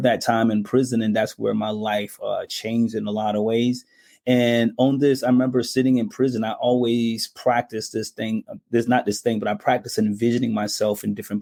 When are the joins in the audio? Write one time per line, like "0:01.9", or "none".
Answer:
none